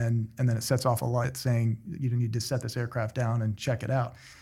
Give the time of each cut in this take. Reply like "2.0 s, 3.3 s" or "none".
1.3 s